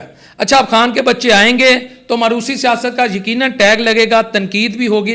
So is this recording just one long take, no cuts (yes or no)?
yes